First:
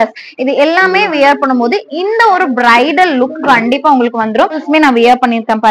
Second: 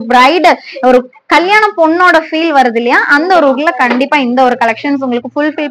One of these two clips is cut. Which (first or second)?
first